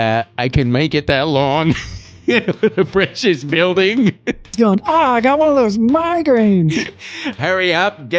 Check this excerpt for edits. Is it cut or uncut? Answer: cut